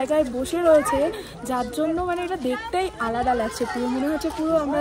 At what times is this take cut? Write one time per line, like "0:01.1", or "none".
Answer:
none

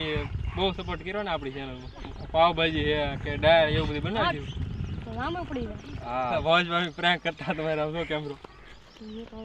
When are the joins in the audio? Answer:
0:02.0
0:06.3
0:08.5

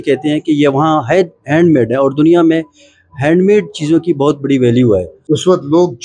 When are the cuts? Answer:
0:05.1

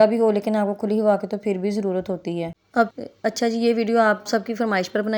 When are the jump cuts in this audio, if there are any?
0:02.9

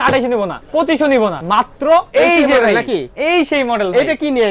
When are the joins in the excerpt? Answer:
0:01.8

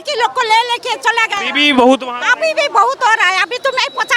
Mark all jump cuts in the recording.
none

